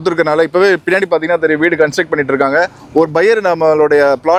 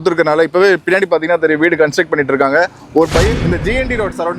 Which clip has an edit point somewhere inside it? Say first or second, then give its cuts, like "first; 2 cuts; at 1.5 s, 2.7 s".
second; 1 cut; at 3.3 s